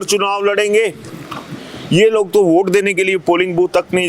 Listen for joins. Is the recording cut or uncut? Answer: uncut